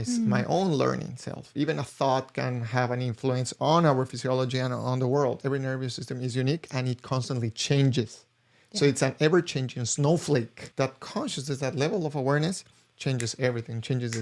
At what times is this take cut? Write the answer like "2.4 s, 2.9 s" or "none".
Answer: 1.5 s, 5.4 s, 10.6 s

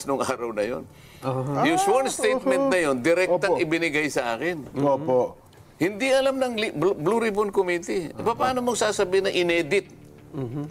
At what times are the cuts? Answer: none

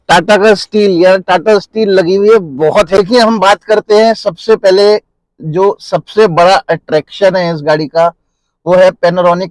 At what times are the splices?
3.0 s

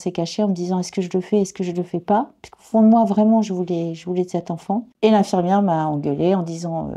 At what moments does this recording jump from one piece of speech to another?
4.9 s

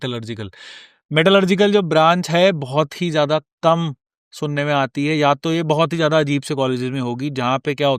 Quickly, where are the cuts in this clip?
none

